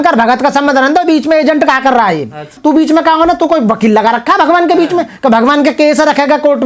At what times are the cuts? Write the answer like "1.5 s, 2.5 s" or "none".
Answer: none